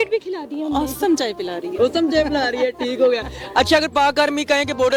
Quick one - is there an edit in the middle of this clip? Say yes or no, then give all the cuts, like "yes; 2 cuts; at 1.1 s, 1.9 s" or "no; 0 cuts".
no; 0 cuts